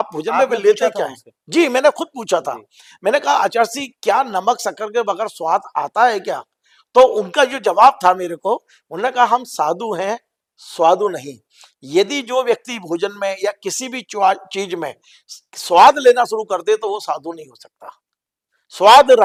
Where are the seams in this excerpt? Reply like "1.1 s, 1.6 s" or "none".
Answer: none